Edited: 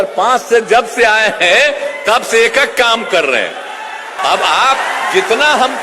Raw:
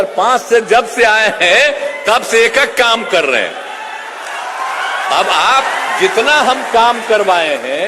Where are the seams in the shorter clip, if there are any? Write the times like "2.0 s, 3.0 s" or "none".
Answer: 4.1 s